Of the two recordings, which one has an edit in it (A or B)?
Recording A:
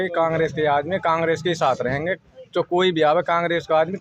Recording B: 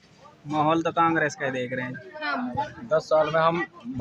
B